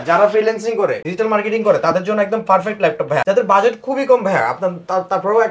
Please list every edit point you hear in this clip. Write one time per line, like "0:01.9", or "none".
none